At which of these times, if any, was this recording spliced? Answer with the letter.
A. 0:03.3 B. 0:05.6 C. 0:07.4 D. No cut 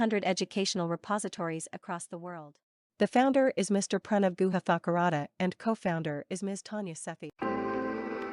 C